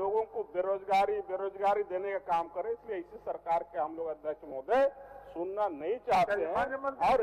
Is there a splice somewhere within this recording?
no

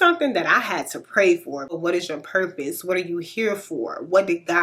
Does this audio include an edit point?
yes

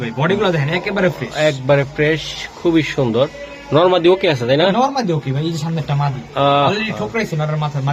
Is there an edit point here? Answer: no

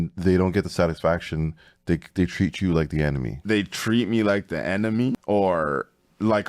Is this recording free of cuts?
no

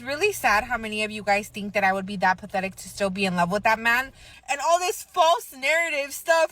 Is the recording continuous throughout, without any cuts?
no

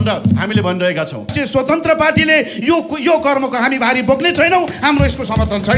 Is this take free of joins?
no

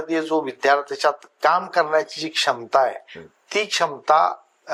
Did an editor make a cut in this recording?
no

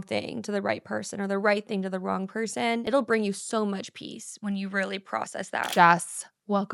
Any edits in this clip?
yes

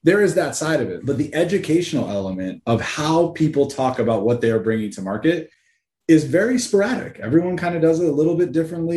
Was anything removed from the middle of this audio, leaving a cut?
yes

